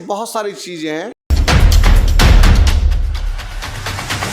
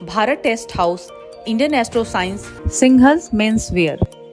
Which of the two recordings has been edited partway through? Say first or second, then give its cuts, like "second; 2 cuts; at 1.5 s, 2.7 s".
first; 1 cut; at 1.2 s